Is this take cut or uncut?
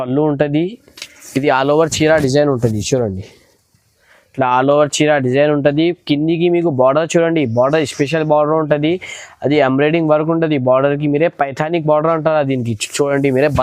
uncut